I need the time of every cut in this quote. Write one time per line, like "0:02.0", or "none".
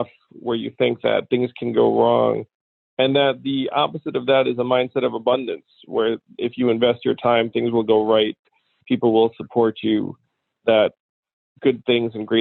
none